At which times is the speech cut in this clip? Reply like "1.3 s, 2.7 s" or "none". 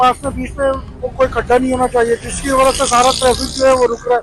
none